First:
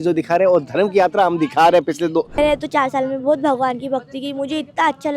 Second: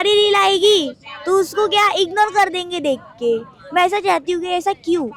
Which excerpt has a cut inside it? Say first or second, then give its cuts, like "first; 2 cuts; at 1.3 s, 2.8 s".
first; 1 cut; at 2.4 s